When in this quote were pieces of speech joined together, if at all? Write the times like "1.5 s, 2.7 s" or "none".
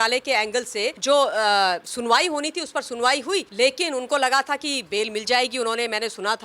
1.0 s, 3.5 s